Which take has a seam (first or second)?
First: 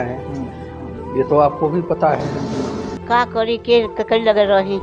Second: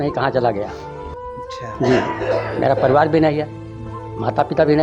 first